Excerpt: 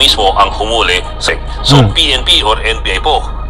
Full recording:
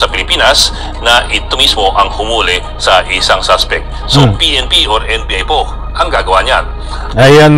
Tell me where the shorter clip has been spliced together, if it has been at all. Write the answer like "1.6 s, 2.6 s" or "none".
1.2 s